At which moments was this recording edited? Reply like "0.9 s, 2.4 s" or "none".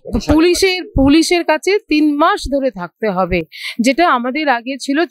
none